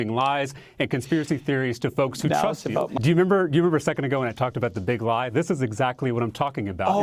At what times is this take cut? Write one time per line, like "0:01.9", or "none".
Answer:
0:02.9